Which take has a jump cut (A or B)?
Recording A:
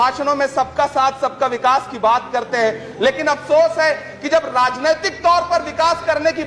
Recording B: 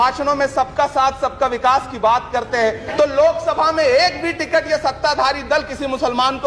B